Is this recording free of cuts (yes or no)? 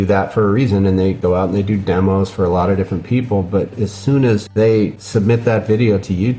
no